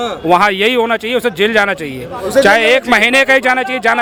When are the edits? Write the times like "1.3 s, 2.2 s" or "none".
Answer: none